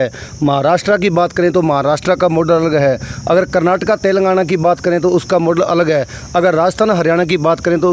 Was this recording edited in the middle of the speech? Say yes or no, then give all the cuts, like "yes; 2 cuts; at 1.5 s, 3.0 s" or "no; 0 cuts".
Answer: no; 0 cuts